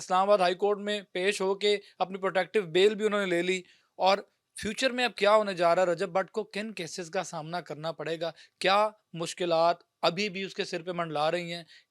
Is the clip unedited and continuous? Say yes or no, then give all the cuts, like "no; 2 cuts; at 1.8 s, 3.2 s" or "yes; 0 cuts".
yes; 0 cuts